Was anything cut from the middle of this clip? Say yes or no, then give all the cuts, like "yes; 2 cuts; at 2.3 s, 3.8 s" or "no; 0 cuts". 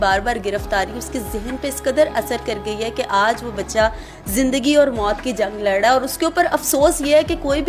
no; 0 cuts